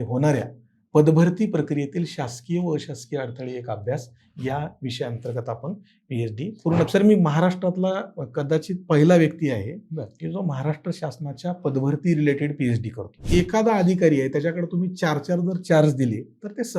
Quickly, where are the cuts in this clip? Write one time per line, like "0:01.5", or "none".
0:06.9
0:13.2